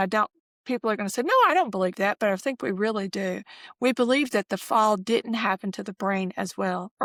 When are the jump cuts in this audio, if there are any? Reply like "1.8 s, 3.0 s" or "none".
none